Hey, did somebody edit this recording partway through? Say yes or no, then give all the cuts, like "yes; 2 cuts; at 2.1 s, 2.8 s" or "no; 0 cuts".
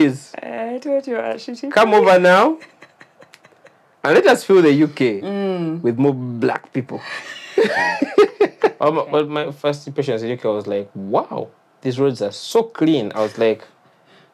yes; 1 cut; at 8.8 s